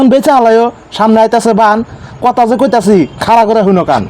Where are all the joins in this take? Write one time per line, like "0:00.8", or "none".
none